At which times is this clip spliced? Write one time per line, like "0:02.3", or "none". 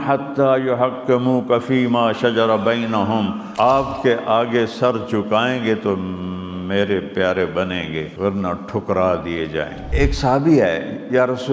0:03.4
0:08.1
0:09.8